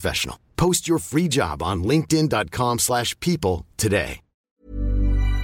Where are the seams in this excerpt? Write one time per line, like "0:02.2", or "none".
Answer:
0:04.5